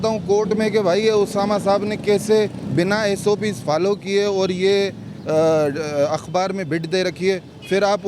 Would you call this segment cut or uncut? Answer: uncut